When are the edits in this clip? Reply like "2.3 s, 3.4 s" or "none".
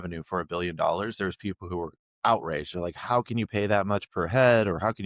none